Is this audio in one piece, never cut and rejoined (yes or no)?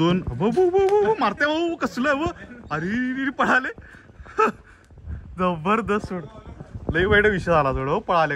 yes